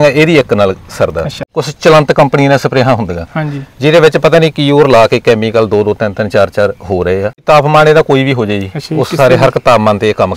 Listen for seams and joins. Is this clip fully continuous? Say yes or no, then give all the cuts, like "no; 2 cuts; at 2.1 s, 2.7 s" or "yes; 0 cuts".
no; 2 cuts; at 1.6 s, 7.4 s